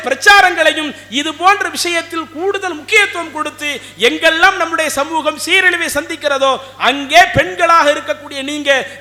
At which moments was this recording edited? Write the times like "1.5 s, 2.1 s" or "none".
none